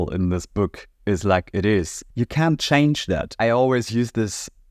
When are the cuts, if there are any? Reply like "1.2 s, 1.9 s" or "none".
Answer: 2.0 s, 3.3 s